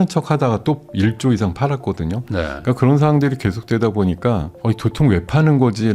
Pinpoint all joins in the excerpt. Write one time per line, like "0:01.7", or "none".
none